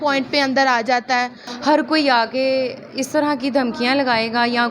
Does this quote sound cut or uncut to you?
cut